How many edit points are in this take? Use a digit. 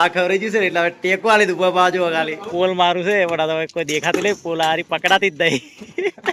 1